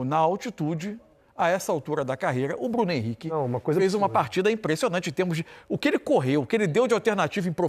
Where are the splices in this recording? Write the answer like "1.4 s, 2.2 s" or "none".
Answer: none

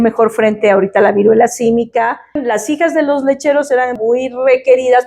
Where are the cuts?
2.4 s, 3.9 s

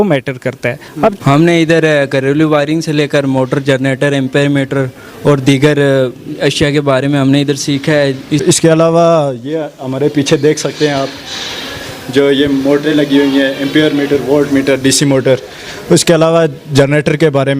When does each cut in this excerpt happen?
1.2 s, 8.4 s

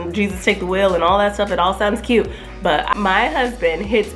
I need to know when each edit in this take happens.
2.9 s

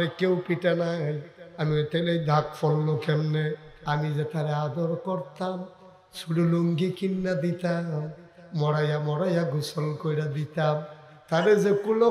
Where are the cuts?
3.7 s

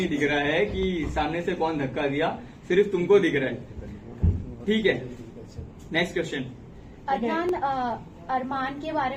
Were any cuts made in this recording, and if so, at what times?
none

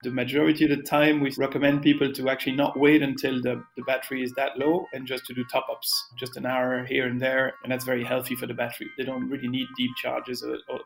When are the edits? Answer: 1.3 s, 6.1 s, 7.6 s, 8.9 s

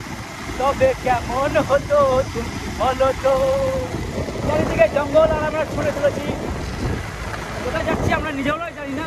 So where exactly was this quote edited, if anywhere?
none

